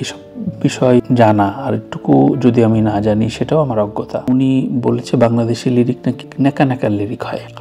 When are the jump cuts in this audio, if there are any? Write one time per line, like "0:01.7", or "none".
0:04.2